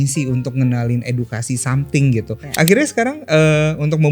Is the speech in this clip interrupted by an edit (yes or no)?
yes